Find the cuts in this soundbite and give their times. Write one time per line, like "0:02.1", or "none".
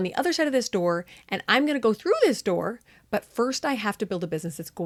none